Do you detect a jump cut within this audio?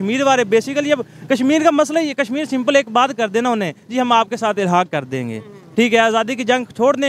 no; 0 cuts

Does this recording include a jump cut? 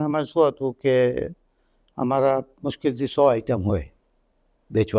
no; 0 cuts

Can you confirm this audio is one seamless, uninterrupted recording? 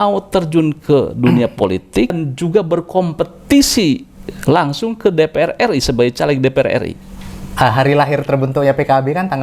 no; 2 cuts; at 2.2 s, 6.9 s

